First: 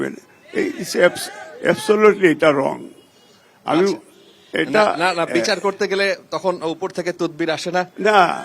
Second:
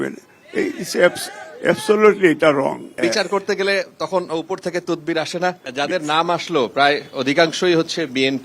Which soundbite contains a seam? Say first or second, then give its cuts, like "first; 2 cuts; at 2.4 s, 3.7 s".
second; 2 cuts; at 3.0 s, 5.6 s